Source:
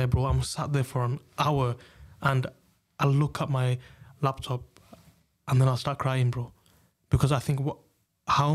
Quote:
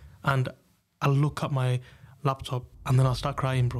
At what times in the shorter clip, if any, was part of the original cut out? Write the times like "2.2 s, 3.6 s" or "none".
2.7 s